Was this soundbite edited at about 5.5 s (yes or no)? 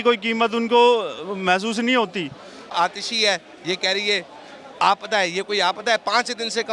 no